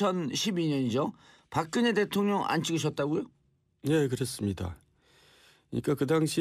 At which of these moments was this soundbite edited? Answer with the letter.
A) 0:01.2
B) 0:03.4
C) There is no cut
C